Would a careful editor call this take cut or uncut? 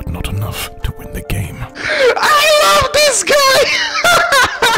uncut